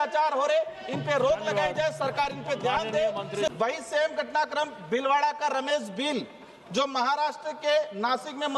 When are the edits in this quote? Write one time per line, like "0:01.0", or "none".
0:03.5